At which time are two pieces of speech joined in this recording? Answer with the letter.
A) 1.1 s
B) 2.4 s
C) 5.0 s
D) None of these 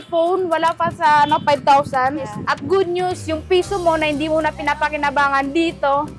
B